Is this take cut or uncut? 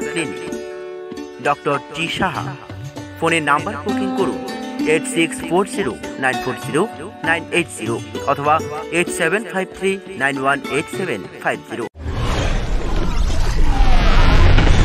cut